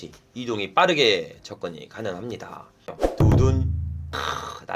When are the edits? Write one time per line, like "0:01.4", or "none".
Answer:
0:02.9